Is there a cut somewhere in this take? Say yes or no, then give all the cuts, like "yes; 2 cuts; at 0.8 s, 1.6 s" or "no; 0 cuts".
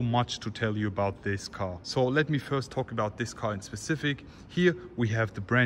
no; 0 cuts